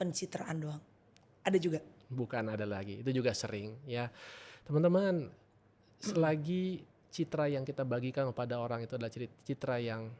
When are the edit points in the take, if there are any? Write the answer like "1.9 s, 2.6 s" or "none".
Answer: none